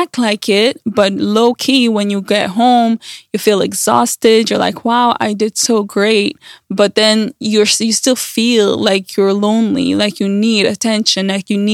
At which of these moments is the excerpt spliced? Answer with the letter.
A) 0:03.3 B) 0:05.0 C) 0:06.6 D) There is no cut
D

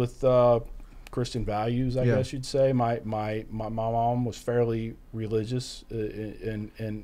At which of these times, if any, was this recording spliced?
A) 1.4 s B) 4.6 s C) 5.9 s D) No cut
D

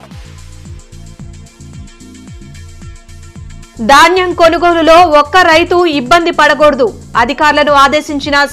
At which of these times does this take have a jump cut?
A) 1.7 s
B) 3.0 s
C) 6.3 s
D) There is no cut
B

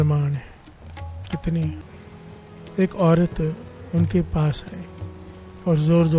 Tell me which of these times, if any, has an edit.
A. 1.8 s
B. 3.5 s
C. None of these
A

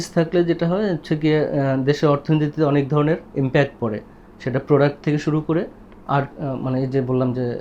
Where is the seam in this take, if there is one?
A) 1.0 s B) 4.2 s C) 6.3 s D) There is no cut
D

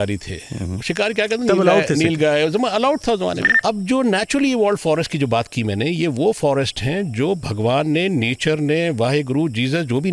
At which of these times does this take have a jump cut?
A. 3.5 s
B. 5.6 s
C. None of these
A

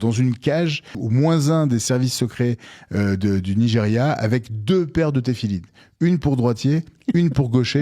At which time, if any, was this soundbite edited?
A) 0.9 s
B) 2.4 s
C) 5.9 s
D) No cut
A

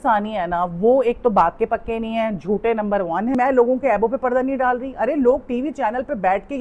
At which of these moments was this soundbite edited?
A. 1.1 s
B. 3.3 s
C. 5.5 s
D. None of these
B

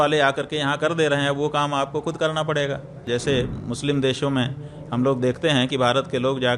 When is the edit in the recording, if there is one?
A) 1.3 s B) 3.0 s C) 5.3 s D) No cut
B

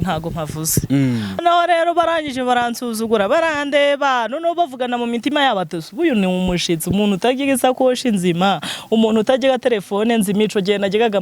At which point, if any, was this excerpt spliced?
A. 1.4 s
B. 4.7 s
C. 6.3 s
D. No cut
A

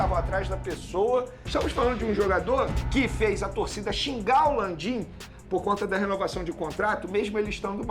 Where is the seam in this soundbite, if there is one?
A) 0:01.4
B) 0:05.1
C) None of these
A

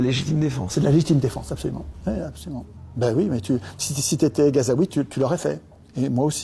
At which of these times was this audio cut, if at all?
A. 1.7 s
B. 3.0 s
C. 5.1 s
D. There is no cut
C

